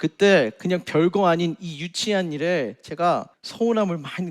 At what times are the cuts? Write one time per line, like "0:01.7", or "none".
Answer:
0:03.4